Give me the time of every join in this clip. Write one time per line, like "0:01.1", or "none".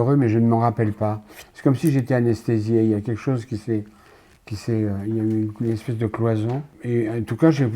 0:06.7

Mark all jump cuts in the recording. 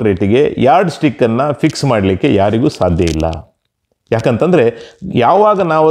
none

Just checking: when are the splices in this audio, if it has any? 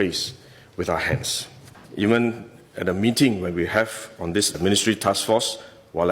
0:01.8

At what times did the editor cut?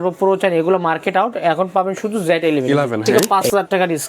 0:03.0

